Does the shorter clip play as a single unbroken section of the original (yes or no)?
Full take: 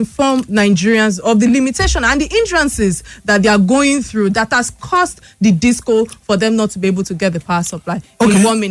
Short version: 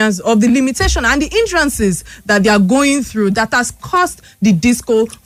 yes